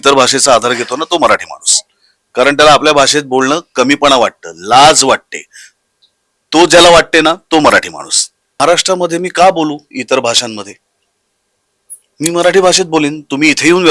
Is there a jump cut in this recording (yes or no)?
yes